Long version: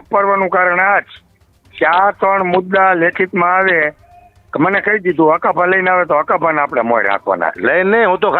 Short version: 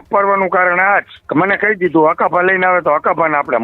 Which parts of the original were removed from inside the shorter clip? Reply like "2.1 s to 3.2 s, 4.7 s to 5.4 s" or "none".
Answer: 1.2 s to 4.4 s